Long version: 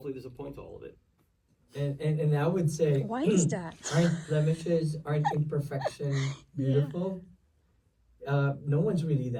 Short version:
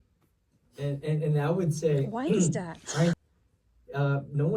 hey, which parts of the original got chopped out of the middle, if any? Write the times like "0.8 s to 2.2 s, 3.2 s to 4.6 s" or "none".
4.2 s to 7.6 s

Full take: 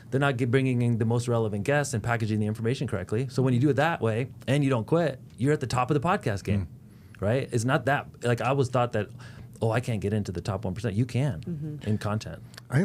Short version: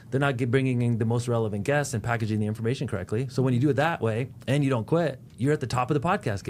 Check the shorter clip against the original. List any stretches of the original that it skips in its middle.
none

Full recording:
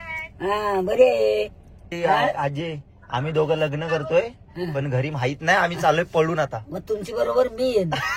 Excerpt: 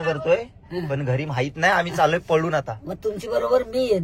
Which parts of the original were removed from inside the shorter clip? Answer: none

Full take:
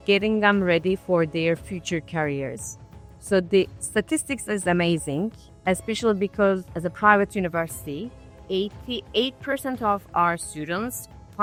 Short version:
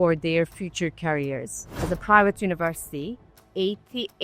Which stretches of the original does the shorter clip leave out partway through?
2.9 s to 6.7 s

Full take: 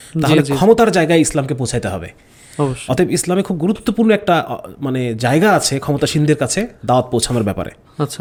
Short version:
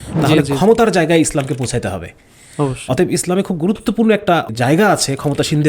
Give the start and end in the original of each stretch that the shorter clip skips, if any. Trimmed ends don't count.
4.5 s to 5.1 s

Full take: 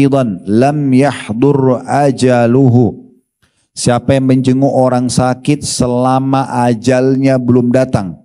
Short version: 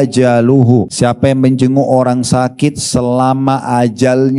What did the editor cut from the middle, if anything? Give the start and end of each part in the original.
3.0 s to 3.8 s

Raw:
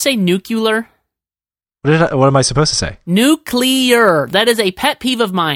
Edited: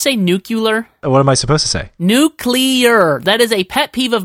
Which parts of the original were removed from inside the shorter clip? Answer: 1.0 s to 2.1 s

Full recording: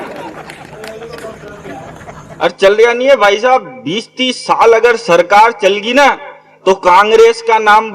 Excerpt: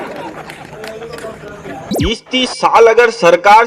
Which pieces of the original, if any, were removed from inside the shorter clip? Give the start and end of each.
1.9 s to 3.8 s

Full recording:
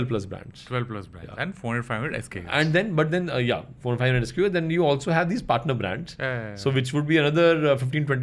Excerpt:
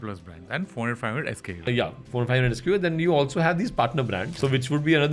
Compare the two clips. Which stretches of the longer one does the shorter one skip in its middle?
2.5 s to 3.3 s, 6.0 s to 6.5 s

